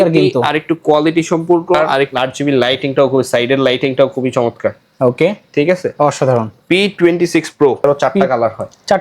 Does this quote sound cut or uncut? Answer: cut